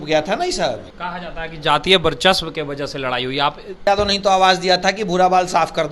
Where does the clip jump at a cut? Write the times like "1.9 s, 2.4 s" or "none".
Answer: 1.0 s, 3.8 s